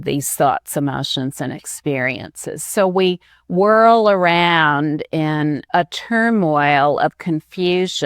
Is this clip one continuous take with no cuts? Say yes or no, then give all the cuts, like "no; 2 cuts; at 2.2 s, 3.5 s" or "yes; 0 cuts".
no; 1 cut; at 5.6 s